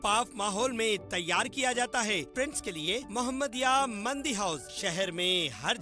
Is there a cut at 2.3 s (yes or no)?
yes